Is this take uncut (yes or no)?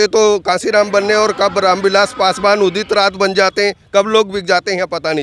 yes